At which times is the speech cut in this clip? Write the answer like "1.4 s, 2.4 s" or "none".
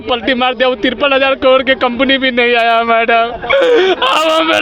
none